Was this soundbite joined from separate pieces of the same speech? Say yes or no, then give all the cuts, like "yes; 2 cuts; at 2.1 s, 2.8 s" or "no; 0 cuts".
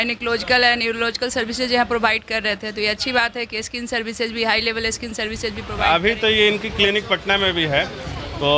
yes; 1 cut; at 5.7 s